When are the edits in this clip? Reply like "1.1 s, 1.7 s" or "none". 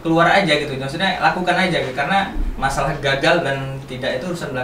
none